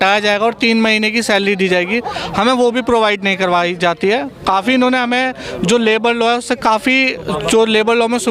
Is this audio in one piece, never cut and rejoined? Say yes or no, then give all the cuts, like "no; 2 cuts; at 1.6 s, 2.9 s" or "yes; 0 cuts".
yes; 0 cuts